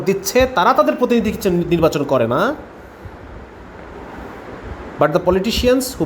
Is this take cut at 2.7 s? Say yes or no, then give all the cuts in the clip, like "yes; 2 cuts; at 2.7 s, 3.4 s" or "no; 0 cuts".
no; 0 cuts